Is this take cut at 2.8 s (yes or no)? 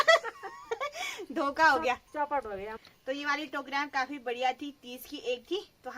yes